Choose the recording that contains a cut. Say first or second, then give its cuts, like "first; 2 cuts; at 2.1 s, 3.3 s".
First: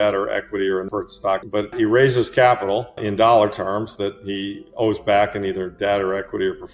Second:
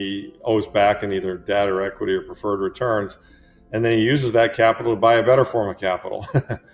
first; 2 cuts; at 1.7 s, 3.0 s